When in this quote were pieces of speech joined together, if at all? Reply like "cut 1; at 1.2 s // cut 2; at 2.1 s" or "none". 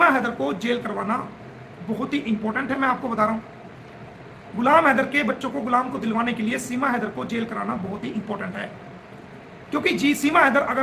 none

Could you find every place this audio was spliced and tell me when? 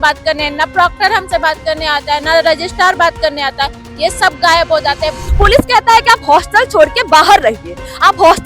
cut 1; at 5.2 s

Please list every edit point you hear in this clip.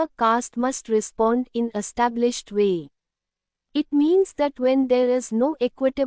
cut 1; at 3.5 s

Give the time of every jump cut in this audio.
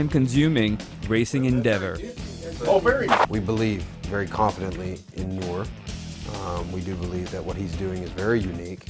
cut 1; at 2.8 s

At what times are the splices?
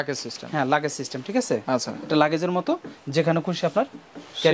none

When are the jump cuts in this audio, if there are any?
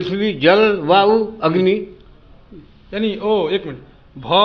none

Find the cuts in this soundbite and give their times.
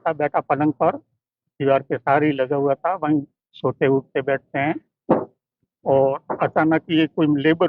none

